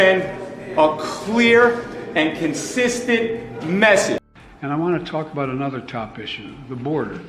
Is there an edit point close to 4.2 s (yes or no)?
yes